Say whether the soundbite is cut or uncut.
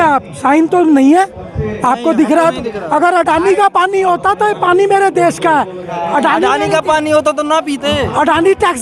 uncut